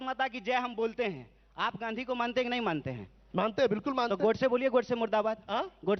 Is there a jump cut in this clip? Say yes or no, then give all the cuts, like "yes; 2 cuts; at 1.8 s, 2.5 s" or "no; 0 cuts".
no; 0 cuts